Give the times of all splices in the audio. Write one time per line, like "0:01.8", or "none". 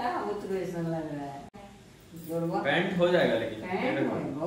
0:01.6